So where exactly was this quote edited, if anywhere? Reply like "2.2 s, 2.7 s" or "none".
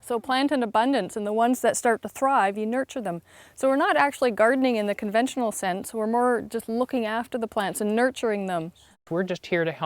8.9 s